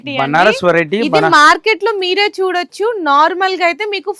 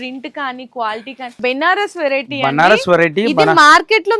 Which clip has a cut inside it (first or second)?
second